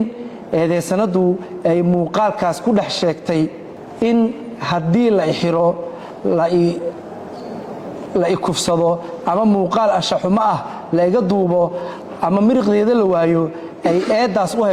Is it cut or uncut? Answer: uncut